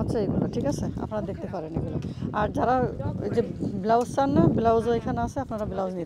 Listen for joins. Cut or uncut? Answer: uncut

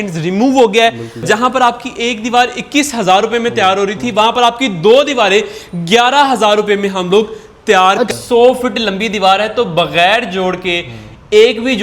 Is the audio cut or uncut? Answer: cut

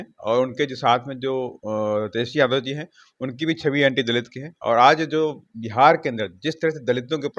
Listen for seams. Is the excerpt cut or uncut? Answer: uncut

